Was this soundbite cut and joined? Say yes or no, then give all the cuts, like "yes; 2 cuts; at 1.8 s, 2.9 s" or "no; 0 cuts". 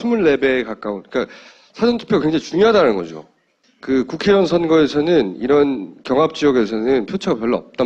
no; 0 cuts